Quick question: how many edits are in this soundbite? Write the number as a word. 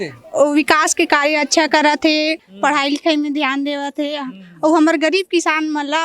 one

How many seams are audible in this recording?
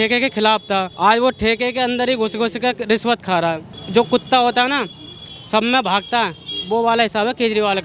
two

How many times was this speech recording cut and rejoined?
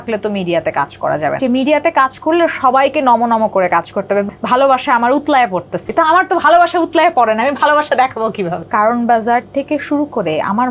four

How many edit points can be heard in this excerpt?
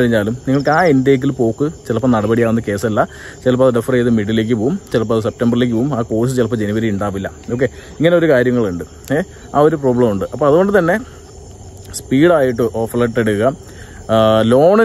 zero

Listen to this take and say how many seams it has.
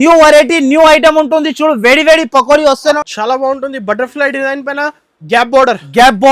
one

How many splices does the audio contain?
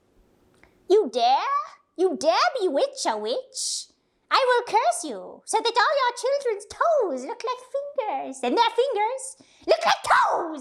zero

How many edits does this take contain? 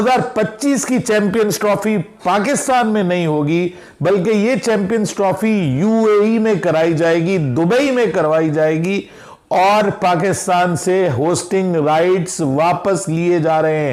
zero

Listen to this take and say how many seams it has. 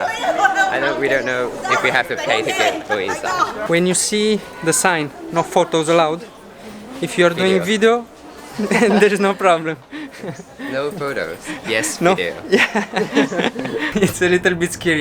two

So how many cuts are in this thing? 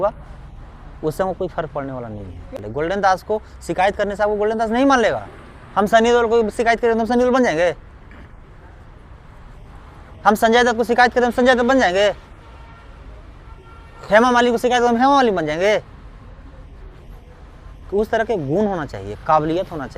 one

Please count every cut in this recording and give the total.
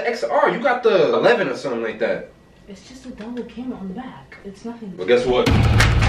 one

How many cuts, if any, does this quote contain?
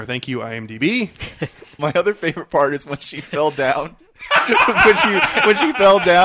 one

